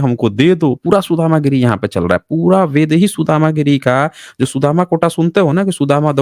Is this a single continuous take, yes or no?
yes